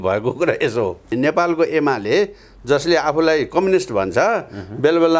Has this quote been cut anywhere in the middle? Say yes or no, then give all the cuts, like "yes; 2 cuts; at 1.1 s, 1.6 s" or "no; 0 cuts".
yes; 1 cut; at 1.1 s